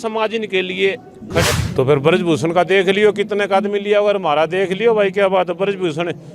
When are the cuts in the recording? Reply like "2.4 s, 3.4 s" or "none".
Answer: 1.6 s